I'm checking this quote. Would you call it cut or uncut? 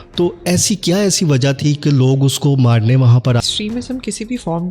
cut